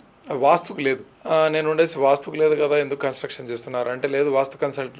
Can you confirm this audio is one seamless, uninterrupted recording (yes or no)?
no